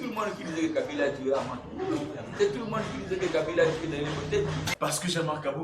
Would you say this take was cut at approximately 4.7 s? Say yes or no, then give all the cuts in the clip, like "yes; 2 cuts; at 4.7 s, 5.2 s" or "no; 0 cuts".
yes; 1 cut; at 4.7 s